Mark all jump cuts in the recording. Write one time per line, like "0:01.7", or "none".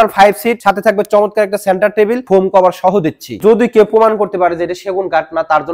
0:02.2
0:03.4